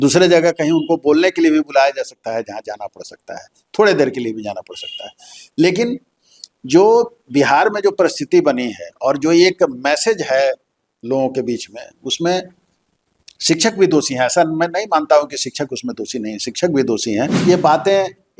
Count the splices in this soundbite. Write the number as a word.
one